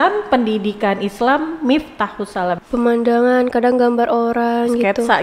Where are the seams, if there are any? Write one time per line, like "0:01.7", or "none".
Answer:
0:02.6

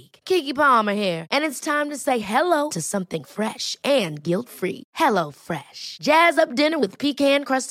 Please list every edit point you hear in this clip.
none

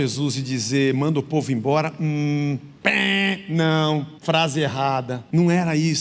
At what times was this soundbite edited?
0:02.7
0:04.1
0:05.2

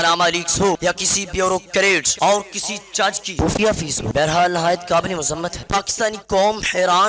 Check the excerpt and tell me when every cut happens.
0:00.8
0:02.1
0:03.3
0:04.0
0:05.7

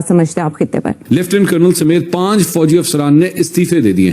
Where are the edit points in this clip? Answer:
0:01.0

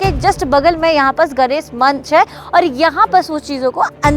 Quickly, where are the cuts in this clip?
none

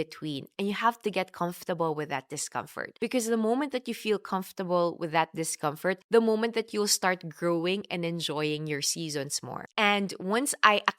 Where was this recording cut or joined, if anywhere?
0:02.8
0:06.0
0:09.6

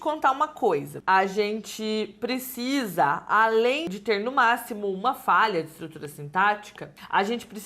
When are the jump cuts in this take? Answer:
0:00.9

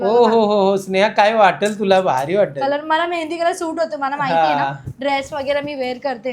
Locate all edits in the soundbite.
none

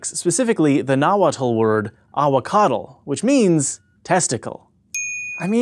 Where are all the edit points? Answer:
0:02.4

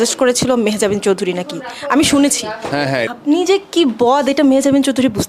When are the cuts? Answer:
0:03.1

